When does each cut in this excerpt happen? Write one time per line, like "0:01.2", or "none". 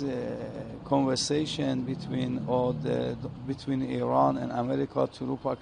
none